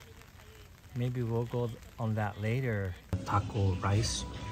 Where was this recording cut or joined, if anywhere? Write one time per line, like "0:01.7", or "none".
0:03.2